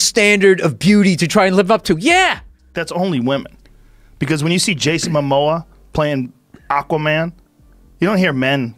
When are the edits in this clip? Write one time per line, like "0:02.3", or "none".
0:02.7